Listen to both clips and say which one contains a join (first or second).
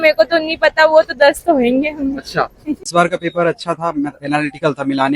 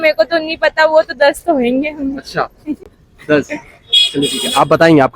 first